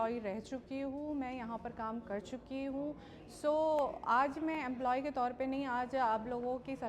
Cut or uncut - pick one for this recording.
uncut